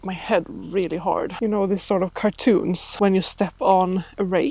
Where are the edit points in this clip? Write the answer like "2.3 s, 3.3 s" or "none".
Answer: 1.3 s, 2.8 s